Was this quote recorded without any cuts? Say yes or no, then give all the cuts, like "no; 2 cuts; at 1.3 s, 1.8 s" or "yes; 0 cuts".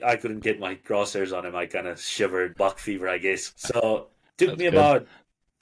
no; 2 cuts; at 2.5 s, 3.6 s